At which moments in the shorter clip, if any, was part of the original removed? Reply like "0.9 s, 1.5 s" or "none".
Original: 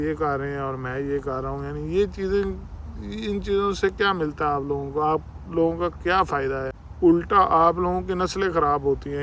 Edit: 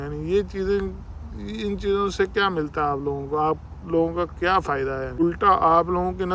5.2 s